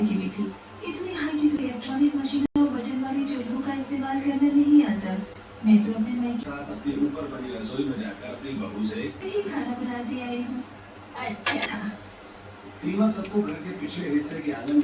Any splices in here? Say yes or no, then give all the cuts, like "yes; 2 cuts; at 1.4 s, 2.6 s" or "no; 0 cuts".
no; 0 cuts